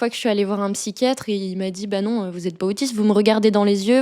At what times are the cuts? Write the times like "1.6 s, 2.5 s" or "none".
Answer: 1.2 s